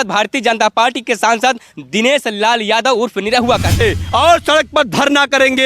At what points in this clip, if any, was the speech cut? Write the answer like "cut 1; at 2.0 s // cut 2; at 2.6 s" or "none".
cut 1; at 3.8 s